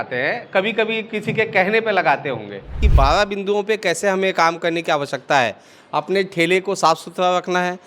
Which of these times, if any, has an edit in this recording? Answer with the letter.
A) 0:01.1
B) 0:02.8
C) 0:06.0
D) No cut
B